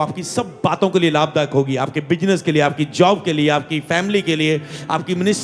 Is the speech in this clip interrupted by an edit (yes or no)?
no